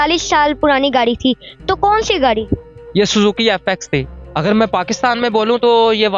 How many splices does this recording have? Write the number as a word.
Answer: one